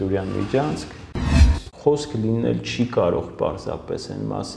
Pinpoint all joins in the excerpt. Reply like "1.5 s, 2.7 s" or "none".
1.3 s

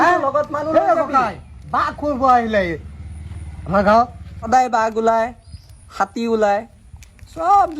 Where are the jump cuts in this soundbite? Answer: 4.5 s

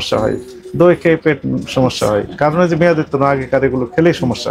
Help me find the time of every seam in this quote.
none

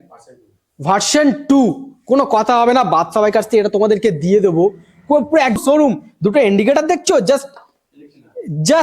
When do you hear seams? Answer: 5.6 s

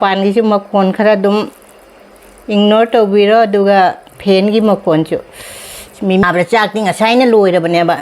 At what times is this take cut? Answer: 6.2 s

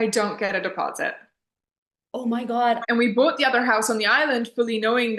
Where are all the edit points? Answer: 2.8 s

